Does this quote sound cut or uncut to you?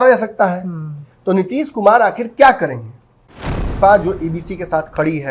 cut